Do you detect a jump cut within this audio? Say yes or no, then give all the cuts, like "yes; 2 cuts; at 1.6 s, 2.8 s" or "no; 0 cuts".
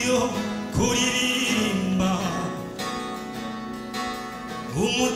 no; 0 cuts